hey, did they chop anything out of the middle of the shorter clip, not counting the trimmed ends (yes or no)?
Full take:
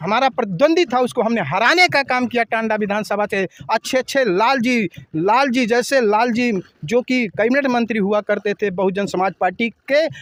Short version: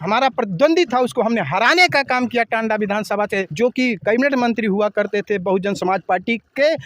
yes